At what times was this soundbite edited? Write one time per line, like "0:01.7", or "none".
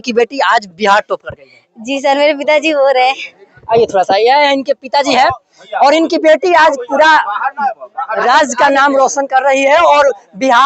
none